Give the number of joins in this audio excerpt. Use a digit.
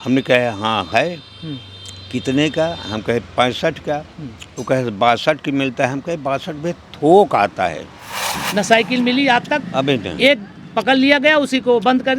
1